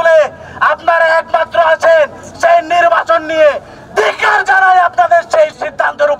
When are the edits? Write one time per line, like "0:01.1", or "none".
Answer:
none